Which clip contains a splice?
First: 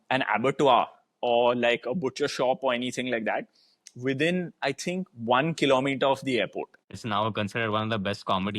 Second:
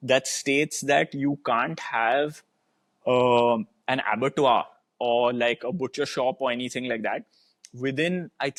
first; 1 cut; at 7.0 s

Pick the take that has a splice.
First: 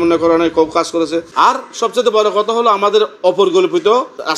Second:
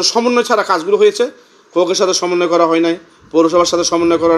first; 1 cut; at 1.3 s

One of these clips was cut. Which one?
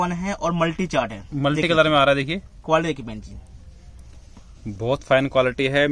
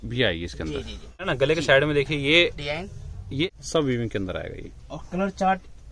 second; 2 cuts; at 1.3 s, 3.5 s

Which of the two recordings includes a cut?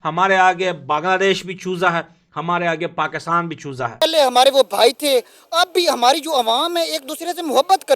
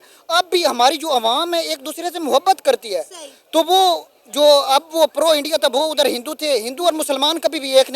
first; 1 cut; at 4.0 s

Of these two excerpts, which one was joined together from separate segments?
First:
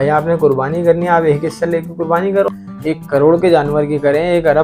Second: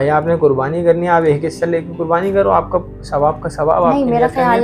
first; 1 cut; at 2.5 s

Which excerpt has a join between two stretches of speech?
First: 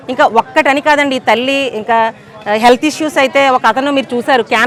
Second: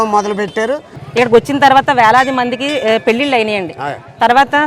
second; 1 cut; at 1.0 s

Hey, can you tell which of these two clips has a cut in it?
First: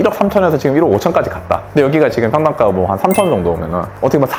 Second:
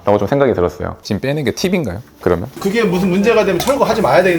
second; 2 cuts; at 0.9 s, 2.6 s

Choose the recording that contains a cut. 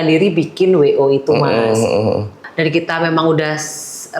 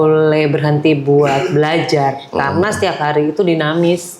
first; 1 cut; at 2.4 s

